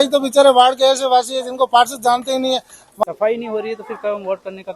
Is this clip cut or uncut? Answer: cut